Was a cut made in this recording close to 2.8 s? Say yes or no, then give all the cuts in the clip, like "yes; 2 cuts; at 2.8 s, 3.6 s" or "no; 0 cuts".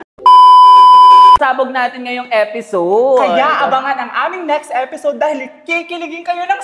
no; 1 cut; at 1.4 s